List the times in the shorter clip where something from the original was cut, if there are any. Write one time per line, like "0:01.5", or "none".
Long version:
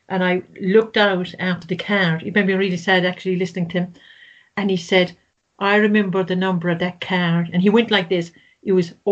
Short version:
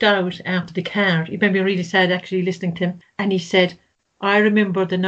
0:03.1